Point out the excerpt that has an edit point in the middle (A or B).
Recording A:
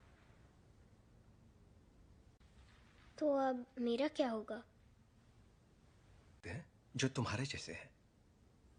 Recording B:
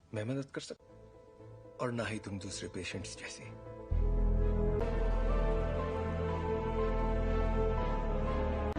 B